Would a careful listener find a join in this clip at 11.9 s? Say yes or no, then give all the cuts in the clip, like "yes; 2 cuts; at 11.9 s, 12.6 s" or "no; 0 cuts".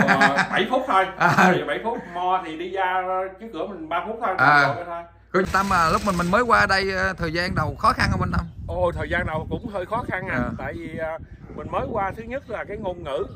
no; 1 cut; at 5.5 s